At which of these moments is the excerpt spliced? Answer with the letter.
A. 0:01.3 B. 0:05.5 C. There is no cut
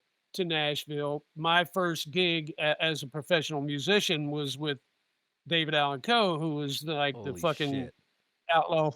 A